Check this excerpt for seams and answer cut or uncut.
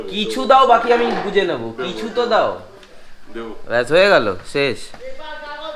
uncut